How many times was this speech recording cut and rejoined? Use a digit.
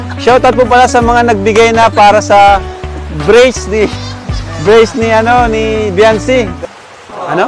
1